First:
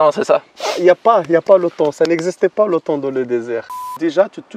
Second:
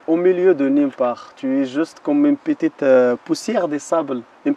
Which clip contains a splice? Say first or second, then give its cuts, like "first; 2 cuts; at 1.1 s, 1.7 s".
first; 1 cut; at 3.7 s